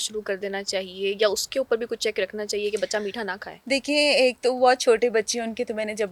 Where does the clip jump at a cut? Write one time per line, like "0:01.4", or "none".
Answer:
none